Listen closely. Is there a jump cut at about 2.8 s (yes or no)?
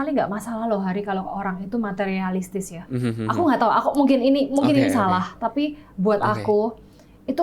yes